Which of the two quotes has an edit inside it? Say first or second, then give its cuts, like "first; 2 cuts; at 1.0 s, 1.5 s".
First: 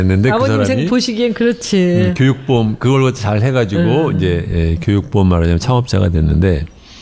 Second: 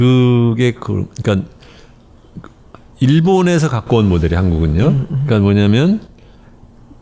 second; 1 cut; at 1.1 s